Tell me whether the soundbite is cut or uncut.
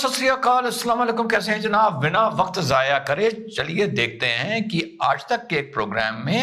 uncut